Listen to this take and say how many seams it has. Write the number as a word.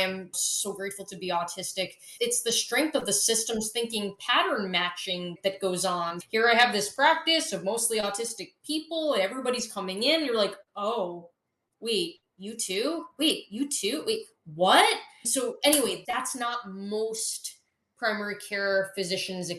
zero